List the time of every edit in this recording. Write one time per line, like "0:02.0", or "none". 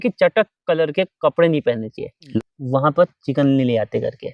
0:02.3